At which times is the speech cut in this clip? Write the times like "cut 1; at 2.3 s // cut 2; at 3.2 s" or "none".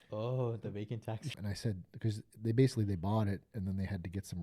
cut 1; at 1.3 s